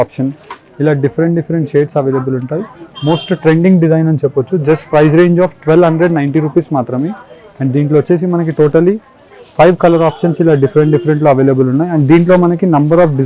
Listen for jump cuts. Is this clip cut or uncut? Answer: uncut